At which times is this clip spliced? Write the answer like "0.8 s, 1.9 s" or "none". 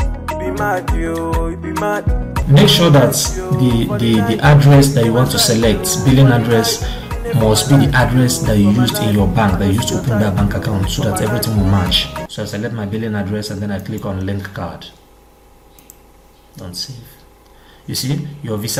none